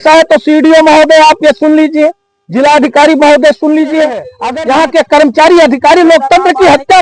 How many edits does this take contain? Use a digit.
1